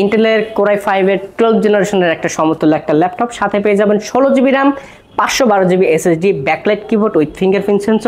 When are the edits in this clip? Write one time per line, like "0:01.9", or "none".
none